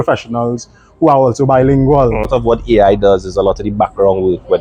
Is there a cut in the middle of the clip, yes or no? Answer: yes